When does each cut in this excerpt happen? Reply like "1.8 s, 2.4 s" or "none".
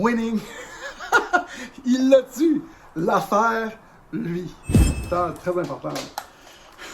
5.0 s